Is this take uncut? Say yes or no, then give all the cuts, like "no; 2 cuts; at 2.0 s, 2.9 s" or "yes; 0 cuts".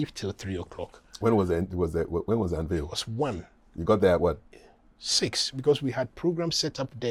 yes; 0 cuts